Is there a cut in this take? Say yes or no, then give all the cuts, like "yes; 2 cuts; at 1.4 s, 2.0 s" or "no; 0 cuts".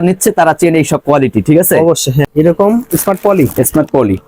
yes; 1 cut; at 2.2 s